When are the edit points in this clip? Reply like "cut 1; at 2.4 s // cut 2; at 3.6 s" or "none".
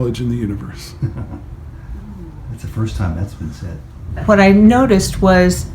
cut 1; at 4.2 s